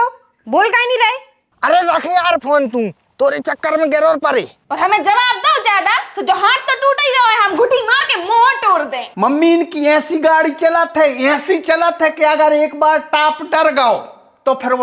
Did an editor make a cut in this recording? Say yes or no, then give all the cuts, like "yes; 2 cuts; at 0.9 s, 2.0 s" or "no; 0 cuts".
yes; 2 cuts; at 4.6 s, 9.0 s